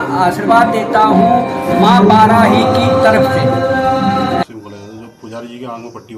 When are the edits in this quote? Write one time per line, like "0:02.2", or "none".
0:04.4